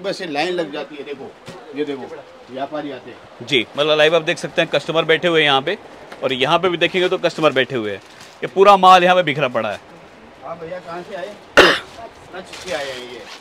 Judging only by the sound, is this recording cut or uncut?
uncut